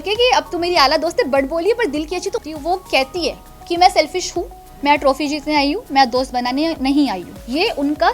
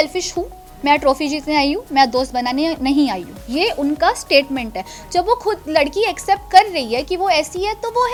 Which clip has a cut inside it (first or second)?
first